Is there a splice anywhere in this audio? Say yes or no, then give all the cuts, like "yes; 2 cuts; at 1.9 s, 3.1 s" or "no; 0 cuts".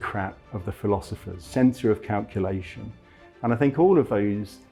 no; 0 cuts